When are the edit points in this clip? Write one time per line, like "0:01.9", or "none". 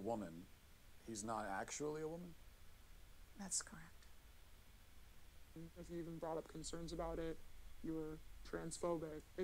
0:05.6